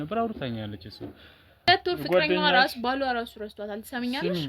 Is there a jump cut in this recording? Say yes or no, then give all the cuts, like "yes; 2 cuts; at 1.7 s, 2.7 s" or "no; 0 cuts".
yes; 1 cut; at 1.7 s